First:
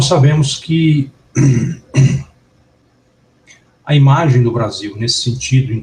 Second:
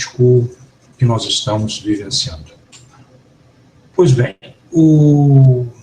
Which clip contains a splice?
second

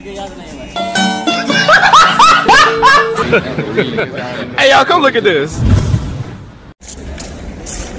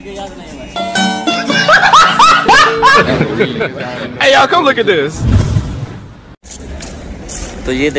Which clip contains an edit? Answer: second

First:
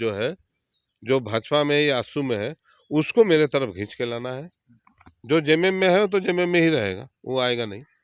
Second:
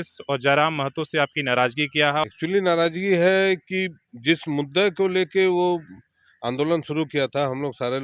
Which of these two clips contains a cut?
second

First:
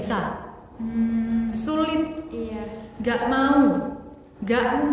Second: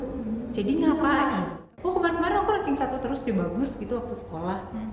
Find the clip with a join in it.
second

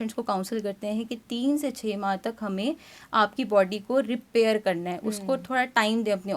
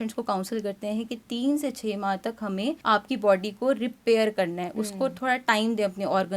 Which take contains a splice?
second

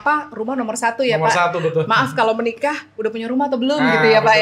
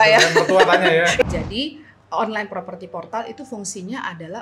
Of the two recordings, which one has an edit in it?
second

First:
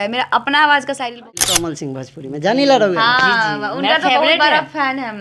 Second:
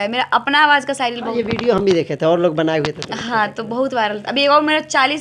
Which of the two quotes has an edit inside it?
first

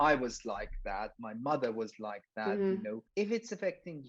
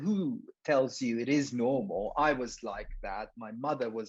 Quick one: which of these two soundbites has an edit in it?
first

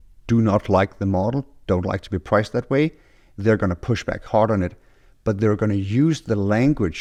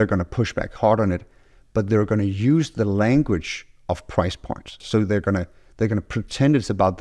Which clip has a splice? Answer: second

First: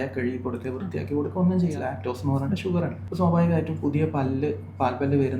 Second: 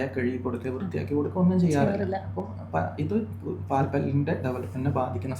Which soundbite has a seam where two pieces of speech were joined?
first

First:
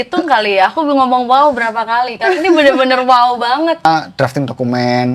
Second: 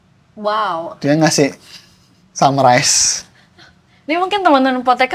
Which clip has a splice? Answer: first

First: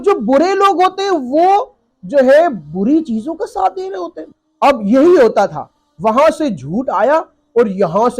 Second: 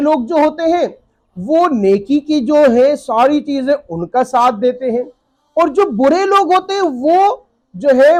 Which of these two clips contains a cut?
first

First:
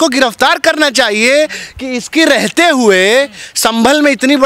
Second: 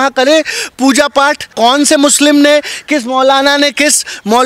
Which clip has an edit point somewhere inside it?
second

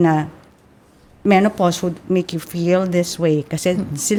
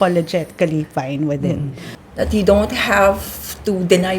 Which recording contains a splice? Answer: second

